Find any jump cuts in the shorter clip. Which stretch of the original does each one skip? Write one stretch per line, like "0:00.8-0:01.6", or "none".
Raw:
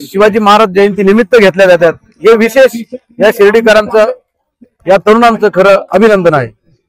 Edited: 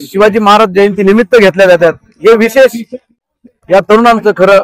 0:03.1-0:04.2